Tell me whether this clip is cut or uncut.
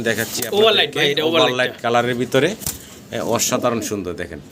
uncut